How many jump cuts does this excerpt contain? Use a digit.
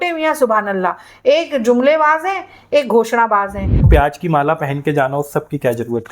1